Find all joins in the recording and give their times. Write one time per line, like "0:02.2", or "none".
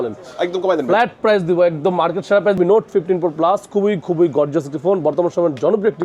0:02.6